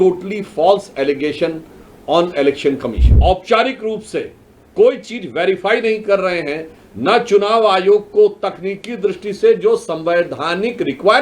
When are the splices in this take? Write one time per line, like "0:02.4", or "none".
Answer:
0:03.1